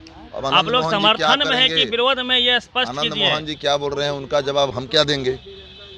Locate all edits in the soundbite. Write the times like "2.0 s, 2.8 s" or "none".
4.7 s